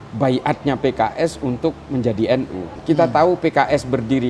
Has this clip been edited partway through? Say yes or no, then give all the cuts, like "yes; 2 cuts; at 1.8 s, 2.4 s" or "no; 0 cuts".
yes; 1 cut; at 2.7 s